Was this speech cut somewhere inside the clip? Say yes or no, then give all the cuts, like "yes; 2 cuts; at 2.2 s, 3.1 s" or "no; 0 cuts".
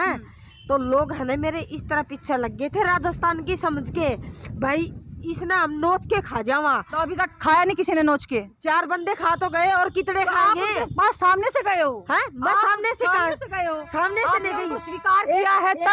no; 0 cuts